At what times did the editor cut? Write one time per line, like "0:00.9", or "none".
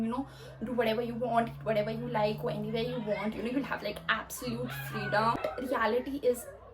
0:05.4